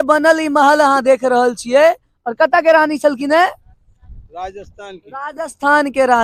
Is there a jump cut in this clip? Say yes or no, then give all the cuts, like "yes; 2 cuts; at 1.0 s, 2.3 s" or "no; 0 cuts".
no; 0 cuts